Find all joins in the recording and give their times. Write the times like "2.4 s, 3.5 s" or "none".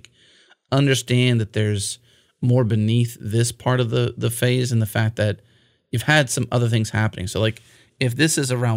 none